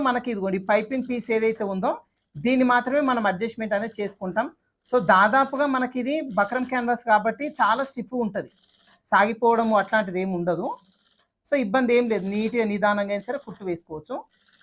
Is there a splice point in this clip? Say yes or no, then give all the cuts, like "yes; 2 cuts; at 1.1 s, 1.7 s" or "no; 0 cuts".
no; 0 cuts